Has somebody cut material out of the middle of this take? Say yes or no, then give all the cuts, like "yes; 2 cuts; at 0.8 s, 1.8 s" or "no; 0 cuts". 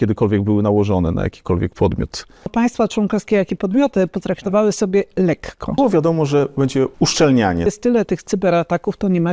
yes; 4 cuts; at 2.5 s, 5.8 s, 6.9 s, 7.7 s